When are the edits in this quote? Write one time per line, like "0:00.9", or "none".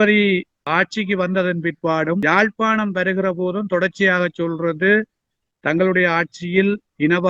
0:02.2